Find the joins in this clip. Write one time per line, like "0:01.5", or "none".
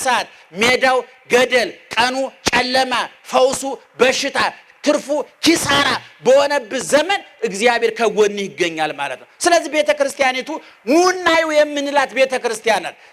none